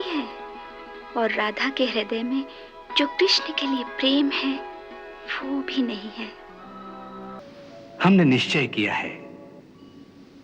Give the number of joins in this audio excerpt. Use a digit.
1